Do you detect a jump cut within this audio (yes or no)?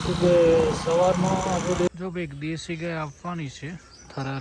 yes